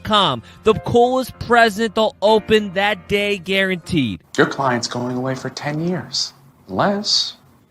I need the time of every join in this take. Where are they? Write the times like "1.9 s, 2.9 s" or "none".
4.2 s